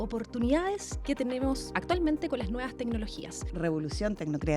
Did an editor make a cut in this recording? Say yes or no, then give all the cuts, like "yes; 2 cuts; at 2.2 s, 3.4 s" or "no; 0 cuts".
yes; 3 cuts; at 0.9 s, 1.7 s, 3.5 s